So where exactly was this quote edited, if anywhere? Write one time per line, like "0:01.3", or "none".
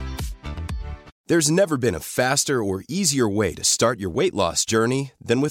0:01.1